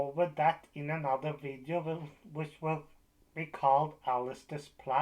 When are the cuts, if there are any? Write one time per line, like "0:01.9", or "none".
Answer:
none